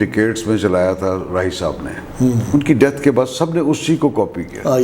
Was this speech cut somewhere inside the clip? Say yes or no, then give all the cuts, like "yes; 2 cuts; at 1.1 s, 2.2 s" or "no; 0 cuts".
no; 0 cuts